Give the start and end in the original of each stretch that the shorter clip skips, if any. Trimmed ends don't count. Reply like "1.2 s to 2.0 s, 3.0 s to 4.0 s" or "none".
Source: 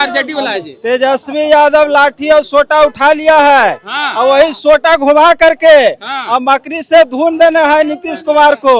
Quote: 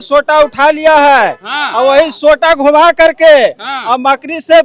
none